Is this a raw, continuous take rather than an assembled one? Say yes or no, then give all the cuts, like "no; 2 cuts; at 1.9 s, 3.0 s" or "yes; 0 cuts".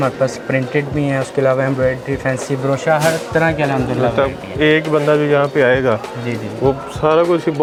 yes; 0 cuts